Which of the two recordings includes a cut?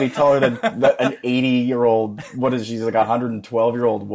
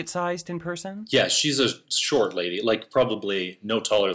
second; 1 cut; at 1.0 s

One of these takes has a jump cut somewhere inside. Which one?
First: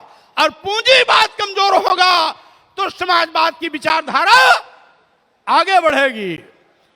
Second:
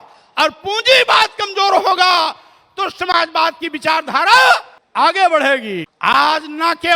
second; 2 cuts; at 4.8 s, 5.8 s

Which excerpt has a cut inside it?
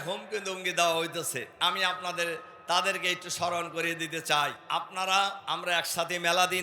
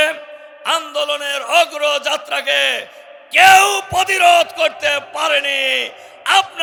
first; 3 cuts; at 1.5 s, 4.6 s, 5.4 s

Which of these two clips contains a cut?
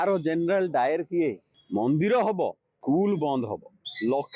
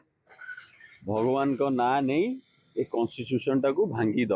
first; 1 cut; at 1.5 s

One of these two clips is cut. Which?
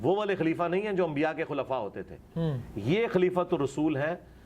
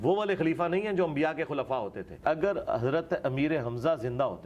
second; 1 cut; at 2.2 s

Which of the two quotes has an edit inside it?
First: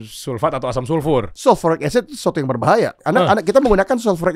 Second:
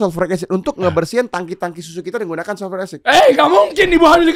first; 2 cuts; at 1.3 s, 3.0 s

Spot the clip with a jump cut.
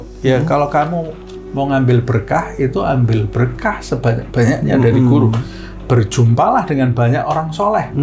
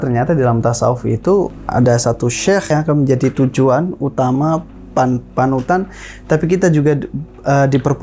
second; 2 cuts; at 1.6 s, 2.7 s

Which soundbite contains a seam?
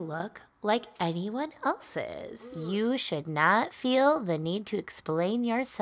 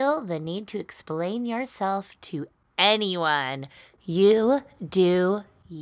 first; 1 cut; at 2.3 s

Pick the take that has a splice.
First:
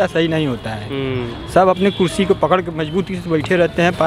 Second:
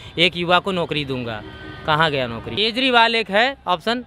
second; 1 cut; at 2.6 s

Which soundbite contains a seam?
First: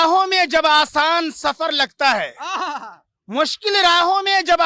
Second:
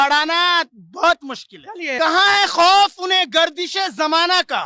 second; 1 cut; at 1.9 s

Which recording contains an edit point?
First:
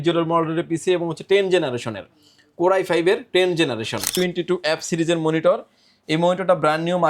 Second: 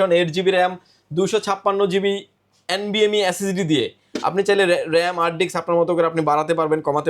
first; 1 cut; at 4.1 s

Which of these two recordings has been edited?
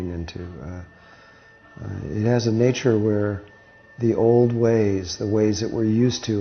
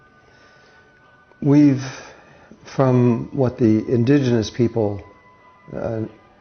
second; 1 cut; at 4.9 s

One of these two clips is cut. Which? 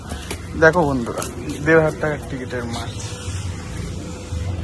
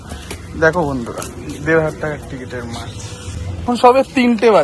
second; 1 cut; at 3.4 s

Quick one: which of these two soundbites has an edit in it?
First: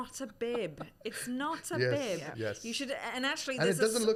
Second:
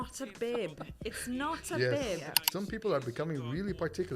second; 1 cut; at 2.3 s

